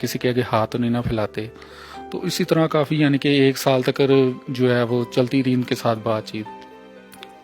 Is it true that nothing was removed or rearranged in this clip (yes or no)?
yes